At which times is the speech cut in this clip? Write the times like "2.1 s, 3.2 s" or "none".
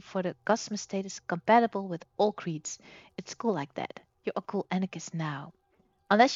none